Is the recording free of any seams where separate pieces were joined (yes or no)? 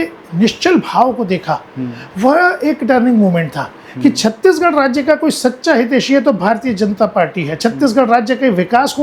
yes